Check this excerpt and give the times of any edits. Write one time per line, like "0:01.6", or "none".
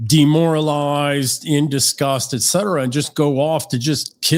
none